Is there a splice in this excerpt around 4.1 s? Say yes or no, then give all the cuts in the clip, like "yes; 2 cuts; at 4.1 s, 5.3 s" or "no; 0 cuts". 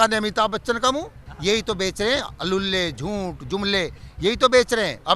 no; 1 cut; at 1.3 s